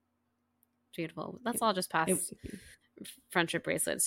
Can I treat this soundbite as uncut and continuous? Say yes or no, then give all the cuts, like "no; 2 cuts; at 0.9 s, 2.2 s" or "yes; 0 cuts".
yes; 0 cuts